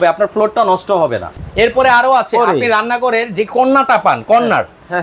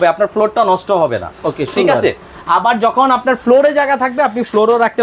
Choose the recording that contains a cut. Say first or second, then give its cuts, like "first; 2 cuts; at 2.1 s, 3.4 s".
first; 1 cut; at 1.4 s